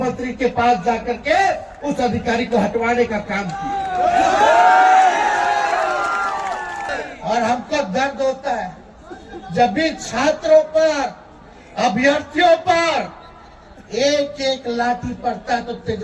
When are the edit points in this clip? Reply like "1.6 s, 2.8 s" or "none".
6.9 s

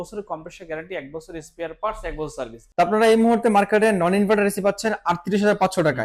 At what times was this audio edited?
2.6 s

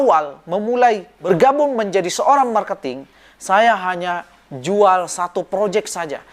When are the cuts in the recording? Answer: 1.1 s

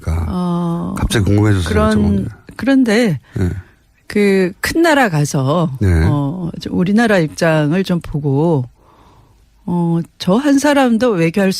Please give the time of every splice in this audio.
5.6 s

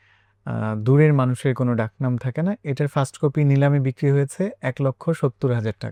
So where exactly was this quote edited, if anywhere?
none

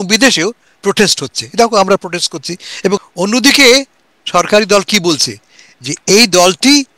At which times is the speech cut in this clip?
3.0 s

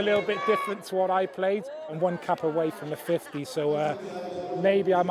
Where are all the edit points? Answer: 1.8 s

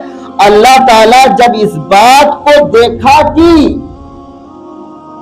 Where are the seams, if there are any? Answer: none

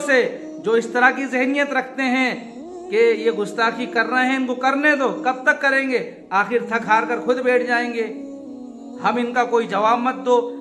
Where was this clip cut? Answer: none

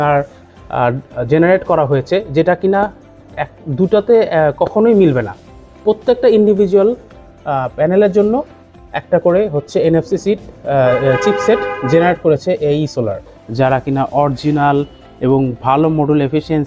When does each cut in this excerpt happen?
13.4 s

